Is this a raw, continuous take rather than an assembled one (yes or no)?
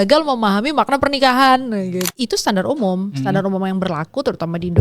no